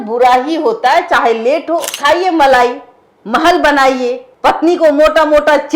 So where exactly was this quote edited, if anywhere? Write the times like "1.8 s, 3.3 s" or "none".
1.9 s, 4.3 s

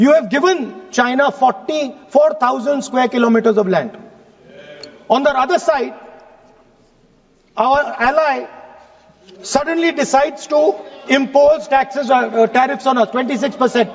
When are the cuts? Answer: none

